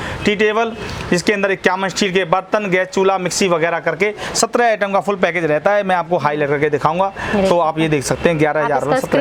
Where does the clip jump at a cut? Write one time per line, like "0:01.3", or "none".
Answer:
none